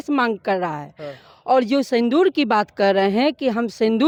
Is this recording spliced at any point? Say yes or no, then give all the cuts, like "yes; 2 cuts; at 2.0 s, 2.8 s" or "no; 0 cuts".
no; 0 cuts